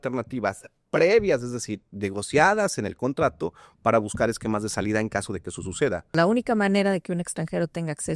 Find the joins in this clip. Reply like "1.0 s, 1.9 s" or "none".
6.1 s

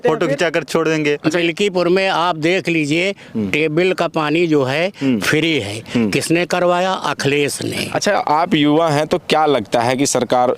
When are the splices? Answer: 1.4 s, 7.8 s

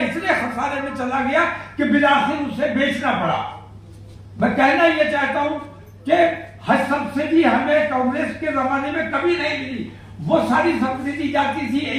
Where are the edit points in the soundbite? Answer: none

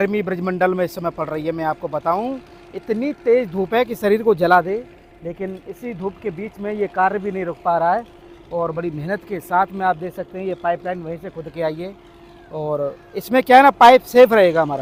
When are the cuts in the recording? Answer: none

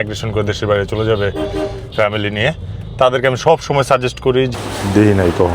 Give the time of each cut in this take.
4.5 s

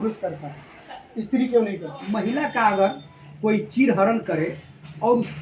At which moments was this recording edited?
2.0 s

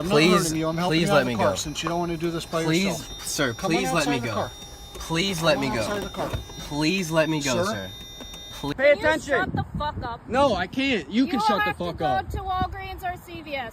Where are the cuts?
8.7 s

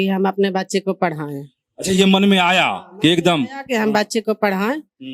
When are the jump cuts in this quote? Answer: none

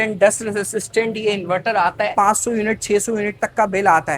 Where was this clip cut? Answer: 2.1 s

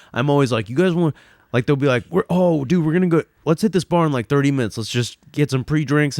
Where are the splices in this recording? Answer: none

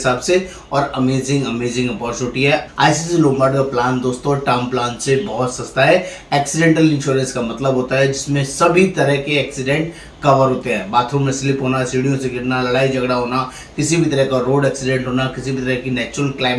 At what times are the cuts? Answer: 2.7 s

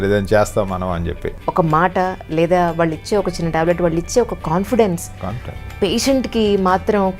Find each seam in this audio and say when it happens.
1.3 s

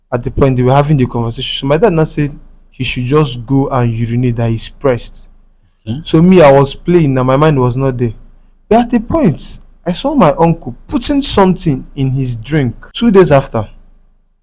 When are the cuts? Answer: 12.8 s

